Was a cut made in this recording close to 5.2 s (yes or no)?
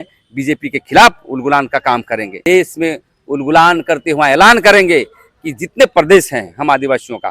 no